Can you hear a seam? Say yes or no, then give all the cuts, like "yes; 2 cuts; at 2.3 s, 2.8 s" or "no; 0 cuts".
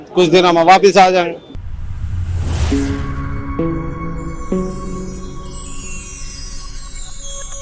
no; 0 cuts